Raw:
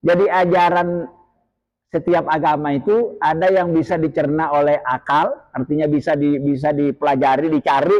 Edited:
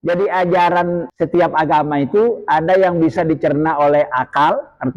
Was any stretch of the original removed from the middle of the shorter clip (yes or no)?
yes